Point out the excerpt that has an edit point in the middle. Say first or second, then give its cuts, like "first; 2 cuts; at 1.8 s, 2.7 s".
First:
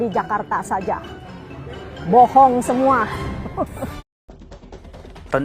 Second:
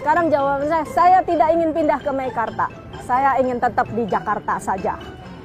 first; 1 cut; at 4.1 s